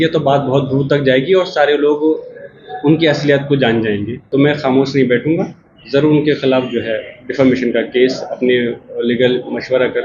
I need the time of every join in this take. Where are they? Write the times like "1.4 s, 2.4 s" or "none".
4.2 s